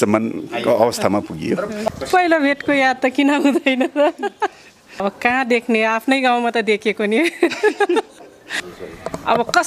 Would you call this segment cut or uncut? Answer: cut